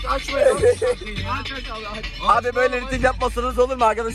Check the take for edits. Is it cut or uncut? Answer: uncut